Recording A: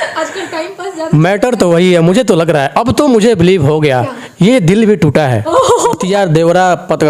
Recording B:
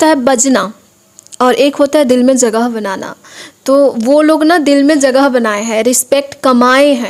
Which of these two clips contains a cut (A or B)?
A